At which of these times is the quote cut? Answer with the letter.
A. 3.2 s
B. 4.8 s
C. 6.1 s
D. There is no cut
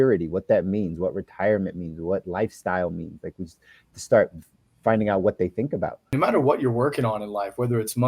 C